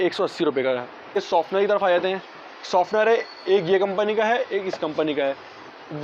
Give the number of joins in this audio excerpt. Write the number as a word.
one